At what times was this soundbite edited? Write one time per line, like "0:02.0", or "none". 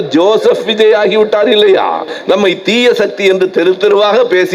0:02.1